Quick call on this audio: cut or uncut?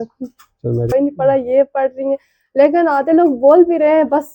cut